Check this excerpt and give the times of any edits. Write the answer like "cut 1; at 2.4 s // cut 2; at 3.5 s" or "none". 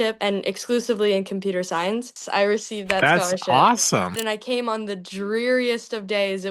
cut 1; at 2.2 s // cut 2; at 4.2 s